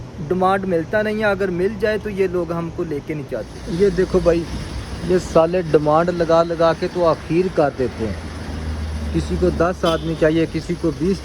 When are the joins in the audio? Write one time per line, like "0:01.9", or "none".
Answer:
0:03.4